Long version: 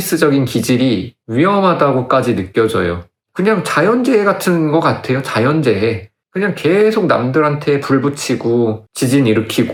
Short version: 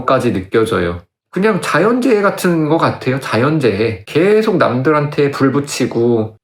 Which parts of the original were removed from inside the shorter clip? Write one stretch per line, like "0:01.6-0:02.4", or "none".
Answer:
0:06.1-0:06.6